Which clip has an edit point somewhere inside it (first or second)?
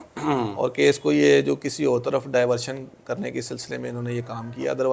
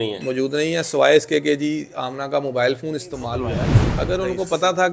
second